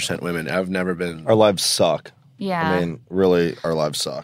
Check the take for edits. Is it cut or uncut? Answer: cut